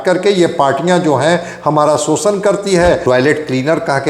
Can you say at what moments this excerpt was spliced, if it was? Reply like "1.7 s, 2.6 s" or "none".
3.0 s